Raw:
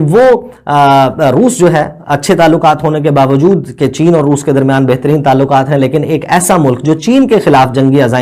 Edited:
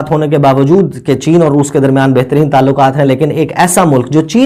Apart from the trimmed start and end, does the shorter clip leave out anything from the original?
no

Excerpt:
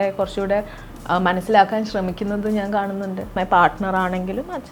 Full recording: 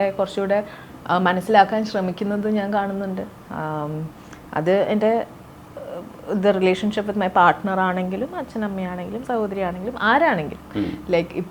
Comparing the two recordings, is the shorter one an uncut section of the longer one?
no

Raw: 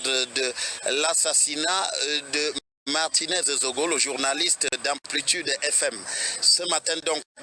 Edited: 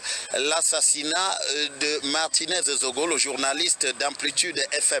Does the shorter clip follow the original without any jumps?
no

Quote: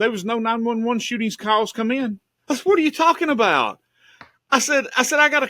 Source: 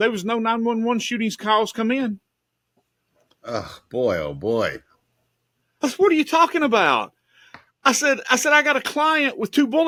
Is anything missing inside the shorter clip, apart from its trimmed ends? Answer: yes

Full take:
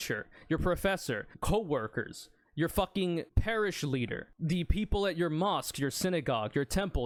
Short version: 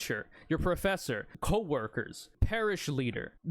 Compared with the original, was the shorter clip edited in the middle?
yes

